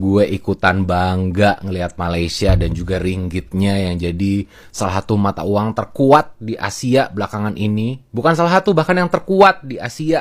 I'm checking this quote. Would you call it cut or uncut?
uncut